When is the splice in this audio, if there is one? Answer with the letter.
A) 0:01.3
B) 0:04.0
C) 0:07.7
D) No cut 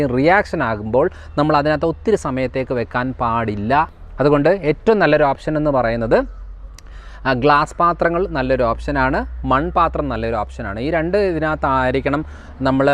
B